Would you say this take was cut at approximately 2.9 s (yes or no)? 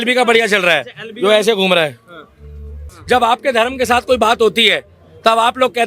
yes